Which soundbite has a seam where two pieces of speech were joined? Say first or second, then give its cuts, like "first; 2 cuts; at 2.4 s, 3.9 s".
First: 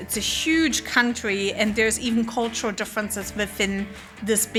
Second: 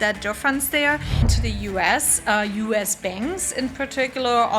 second; 1 cut; at 1.2 s